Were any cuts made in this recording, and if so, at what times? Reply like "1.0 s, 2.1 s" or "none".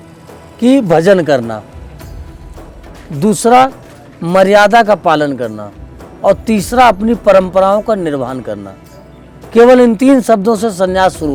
none